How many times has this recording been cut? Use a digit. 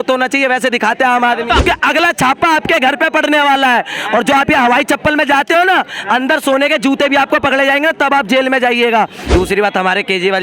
2